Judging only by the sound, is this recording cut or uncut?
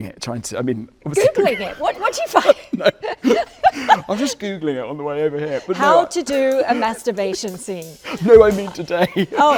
uncut